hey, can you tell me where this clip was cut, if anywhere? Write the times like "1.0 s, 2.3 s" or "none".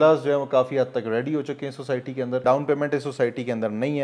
2.4 s